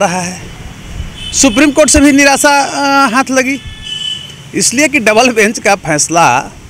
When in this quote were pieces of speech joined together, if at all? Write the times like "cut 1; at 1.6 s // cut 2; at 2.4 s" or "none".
none

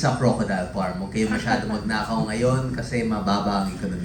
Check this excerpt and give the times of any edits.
none

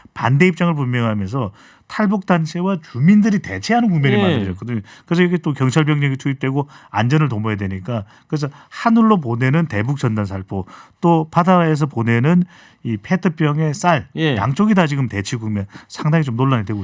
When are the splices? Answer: none

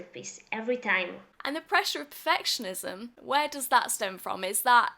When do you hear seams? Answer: cut 1; at 1.3 s // cut 2; at 3.1 s

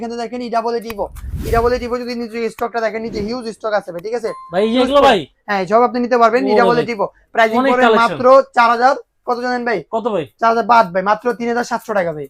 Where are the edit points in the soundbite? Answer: none

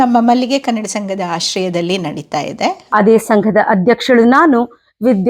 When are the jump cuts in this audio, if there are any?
cut 1; at 2.8 s

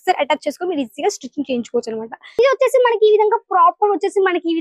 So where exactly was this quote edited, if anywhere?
cut 1; at 2.4 s

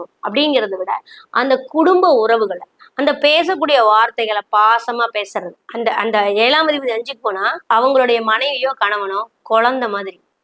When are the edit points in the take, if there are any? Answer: cut 1; at 5.6 s

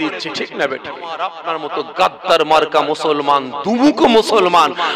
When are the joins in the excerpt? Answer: cut 1; at 1.3 s

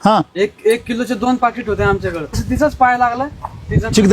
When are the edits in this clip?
cut 1; at 2.4 s

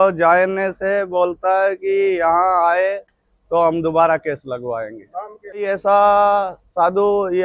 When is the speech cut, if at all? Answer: cut 1; at 5.6 s

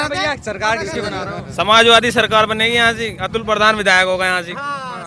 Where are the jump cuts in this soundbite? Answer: none

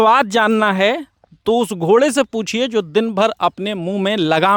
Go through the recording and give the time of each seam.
none

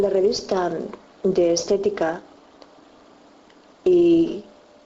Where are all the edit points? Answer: cut 1; at 3.6 s

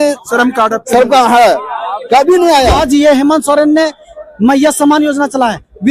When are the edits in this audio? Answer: cut 1; at 2.8 s

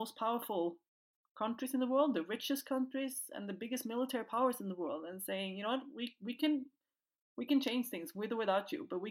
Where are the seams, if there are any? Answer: none

